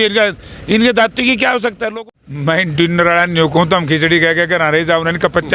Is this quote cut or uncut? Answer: cut